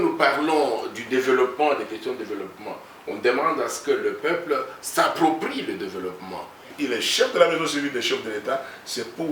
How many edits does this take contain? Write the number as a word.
one